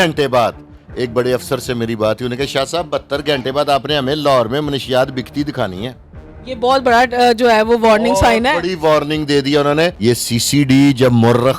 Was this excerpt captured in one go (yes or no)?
no